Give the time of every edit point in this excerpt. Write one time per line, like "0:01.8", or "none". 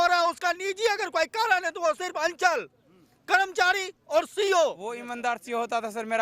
0:05.1